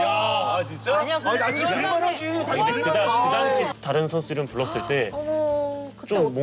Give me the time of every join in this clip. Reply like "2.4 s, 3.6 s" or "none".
3.7 s